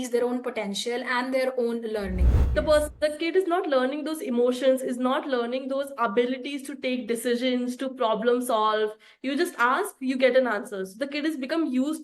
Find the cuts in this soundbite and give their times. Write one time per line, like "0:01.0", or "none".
0:02.3